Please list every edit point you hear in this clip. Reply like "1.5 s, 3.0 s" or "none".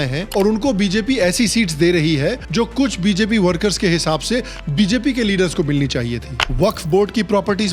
6.4 s